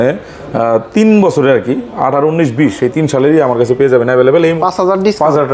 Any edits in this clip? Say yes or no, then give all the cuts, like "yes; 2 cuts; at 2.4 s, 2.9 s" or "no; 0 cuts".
yes; 1 cut; at 4.6 s